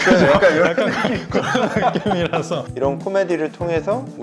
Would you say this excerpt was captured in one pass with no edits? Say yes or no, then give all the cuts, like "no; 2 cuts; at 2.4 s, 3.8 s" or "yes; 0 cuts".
no; 1 cut; at 2.7 s